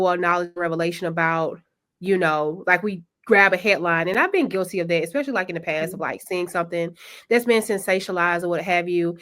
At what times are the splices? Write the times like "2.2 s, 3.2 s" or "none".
none